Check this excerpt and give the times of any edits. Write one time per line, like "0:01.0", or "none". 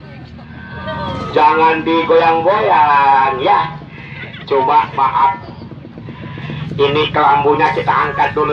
none